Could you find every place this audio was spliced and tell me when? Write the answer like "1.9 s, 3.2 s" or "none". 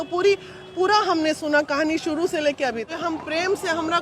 2.9 s